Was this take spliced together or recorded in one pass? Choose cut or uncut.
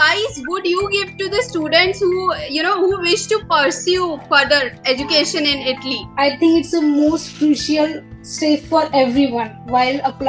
cut